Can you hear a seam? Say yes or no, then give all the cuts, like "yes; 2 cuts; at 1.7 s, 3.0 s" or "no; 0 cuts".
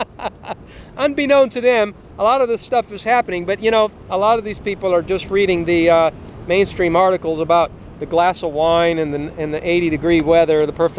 no; 0 cuts